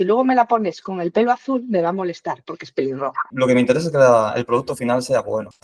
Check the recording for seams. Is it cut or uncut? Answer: cut